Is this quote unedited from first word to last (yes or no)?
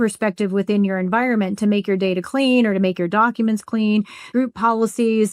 no